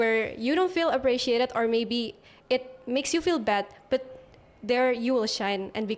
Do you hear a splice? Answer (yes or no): no